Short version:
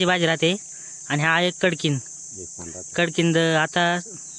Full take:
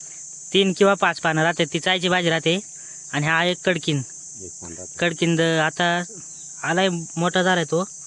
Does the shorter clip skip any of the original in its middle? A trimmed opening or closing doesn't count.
no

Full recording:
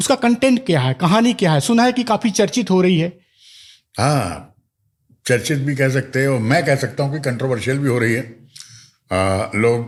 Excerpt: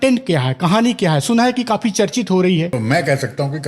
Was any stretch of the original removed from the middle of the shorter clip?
yes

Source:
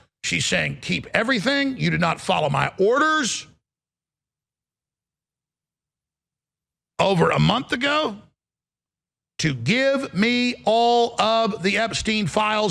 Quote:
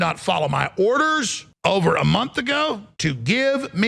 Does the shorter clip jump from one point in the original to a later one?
yes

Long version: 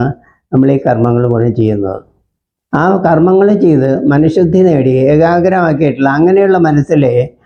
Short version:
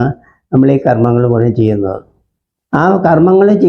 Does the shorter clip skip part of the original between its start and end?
no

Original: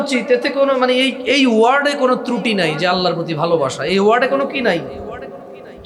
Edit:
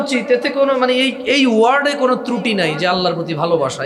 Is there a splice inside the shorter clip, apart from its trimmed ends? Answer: no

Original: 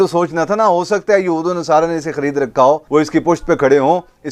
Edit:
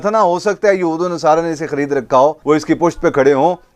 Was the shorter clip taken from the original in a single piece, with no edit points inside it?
yes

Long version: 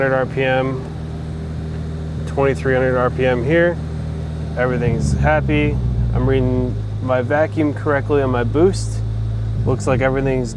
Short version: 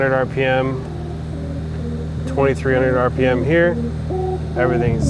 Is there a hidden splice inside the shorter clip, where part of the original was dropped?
no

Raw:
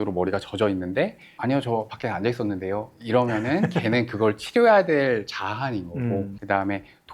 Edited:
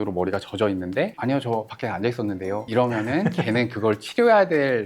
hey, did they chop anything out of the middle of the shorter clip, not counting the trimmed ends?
yes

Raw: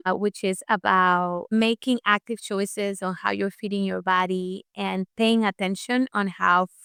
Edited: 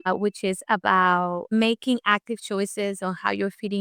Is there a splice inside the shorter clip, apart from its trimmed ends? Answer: no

